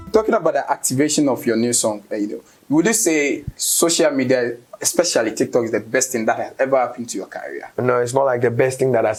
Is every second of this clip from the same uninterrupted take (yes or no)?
yes